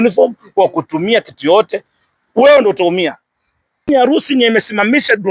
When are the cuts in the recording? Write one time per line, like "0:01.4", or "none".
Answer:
0:03.9